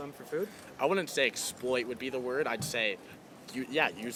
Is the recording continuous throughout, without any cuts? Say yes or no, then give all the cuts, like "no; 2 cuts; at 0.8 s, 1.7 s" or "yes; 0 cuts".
yes; 0 cuts